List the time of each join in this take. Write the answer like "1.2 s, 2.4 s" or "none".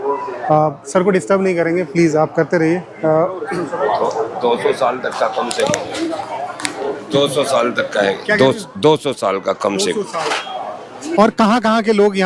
none